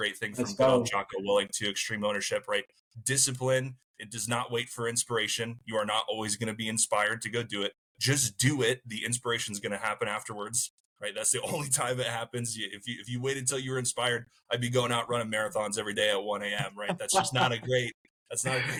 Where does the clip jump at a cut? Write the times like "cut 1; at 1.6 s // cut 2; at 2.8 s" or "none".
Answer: none